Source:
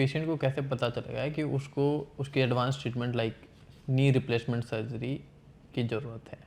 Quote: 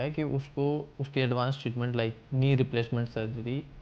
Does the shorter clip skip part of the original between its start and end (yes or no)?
yes